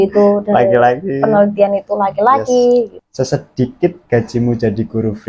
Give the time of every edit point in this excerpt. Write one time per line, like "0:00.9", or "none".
0:03.0